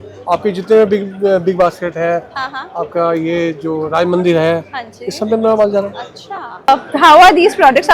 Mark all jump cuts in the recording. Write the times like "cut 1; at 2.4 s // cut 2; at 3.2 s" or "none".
cut 1; at 6.7 s